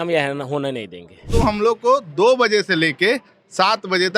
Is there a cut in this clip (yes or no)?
yes